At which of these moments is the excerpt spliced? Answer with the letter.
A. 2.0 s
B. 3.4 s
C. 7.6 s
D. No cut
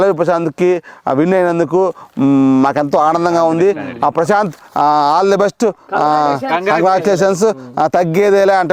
D